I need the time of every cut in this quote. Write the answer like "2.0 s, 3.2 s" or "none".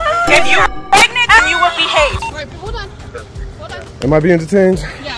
2.2 s

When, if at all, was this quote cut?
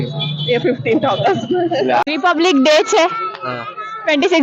2.0 s

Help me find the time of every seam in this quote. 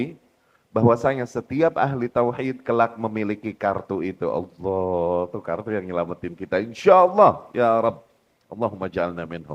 none

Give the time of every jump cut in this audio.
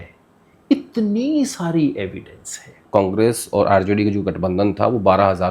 2.8 s

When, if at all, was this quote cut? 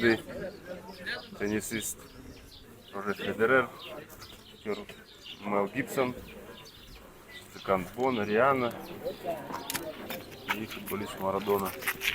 10.1 s

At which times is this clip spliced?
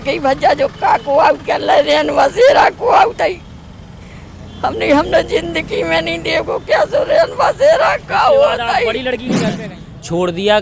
9.6 s

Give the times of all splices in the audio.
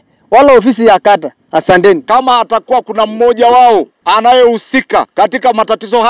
2.0 s, 3.9 s, 5.1 s

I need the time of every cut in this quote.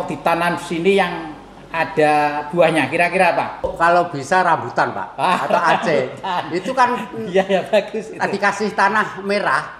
3.7 s

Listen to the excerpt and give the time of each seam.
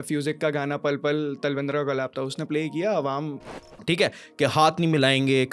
3.5 s

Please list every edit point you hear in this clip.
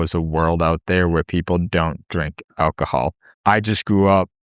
3.3 s

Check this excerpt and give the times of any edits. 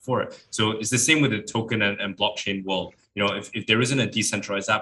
none

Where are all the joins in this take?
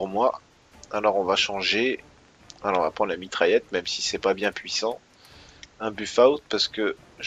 none

